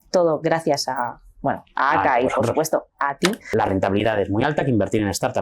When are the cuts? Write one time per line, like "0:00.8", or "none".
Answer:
0:03.5